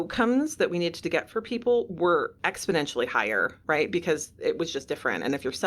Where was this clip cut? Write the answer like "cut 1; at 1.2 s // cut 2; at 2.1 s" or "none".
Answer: cut 1; at 2.4 s // cut 2; at 3.5 s